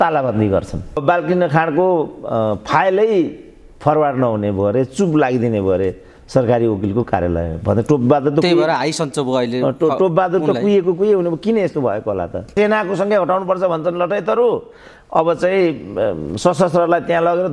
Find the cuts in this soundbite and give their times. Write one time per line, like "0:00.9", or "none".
0:01.0
0:12.5